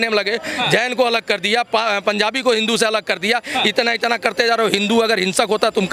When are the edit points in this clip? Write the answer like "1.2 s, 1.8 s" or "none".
none